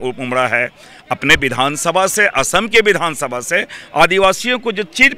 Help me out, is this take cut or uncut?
uncut